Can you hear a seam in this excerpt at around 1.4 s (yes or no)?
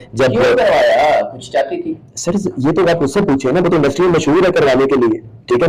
no